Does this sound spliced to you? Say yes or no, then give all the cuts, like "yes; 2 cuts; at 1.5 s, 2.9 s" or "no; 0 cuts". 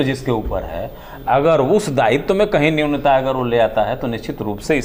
no; 0 cuts